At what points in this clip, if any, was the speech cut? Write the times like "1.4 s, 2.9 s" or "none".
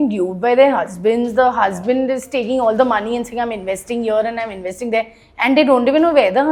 none